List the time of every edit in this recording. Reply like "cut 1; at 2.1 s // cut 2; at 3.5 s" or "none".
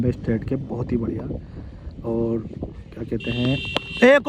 none